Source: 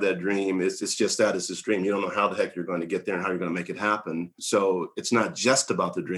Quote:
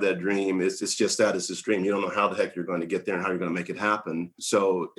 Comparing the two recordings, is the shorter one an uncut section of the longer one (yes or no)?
yes